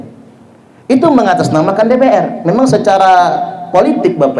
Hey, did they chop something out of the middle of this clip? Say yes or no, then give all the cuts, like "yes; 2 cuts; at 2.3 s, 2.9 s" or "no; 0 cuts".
no; 0 cuts